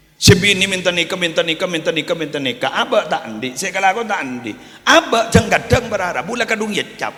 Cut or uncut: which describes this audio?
uncut